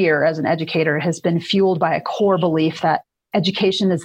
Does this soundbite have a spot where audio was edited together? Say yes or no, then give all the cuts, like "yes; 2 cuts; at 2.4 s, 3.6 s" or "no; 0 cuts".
yes; 1 cut; at 3.2 s